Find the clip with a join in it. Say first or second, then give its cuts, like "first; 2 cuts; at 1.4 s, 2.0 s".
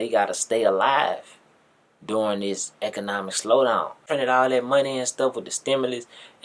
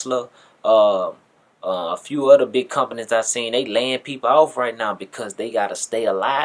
first; 1 cut; at 4.0 s